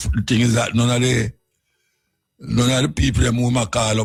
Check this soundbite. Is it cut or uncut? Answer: uncut